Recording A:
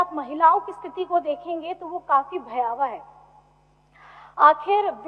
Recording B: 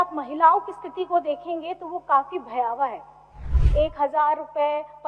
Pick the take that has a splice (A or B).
B